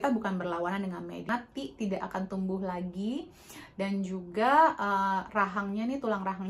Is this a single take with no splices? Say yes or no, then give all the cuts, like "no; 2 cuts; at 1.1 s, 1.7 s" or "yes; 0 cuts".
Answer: no; 1 cut; at 1.3 s